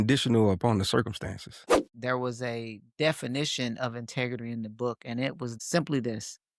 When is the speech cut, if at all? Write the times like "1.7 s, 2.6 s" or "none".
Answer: 1.9 s, 5.5 s